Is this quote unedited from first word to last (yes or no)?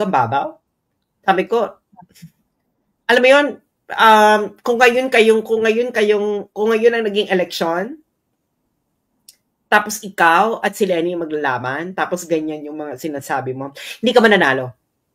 yes